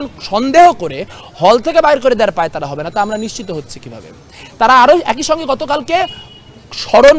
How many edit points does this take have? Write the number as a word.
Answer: zero